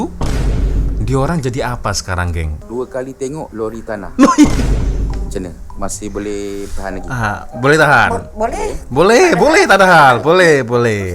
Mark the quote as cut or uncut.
cut